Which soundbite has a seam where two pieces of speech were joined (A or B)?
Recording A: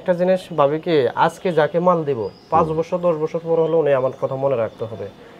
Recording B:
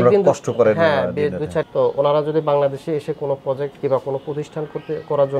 B